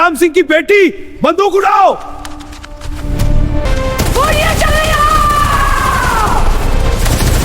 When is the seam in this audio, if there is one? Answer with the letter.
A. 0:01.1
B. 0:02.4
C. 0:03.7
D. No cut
C